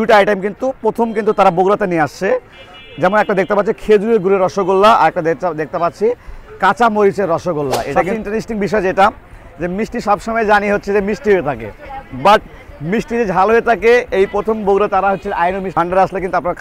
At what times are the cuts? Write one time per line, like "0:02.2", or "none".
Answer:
0:08.1
0:15.7